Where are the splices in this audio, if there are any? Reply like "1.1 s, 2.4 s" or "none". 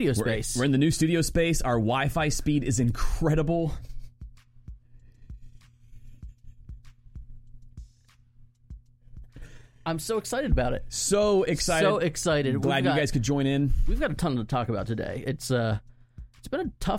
none